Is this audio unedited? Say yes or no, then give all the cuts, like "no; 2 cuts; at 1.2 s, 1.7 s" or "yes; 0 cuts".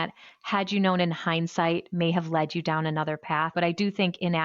no; 1 cut; at 3.5 s